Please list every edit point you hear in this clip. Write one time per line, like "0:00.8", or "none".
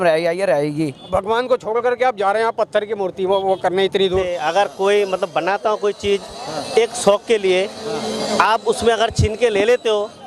0:01.1
0:04.3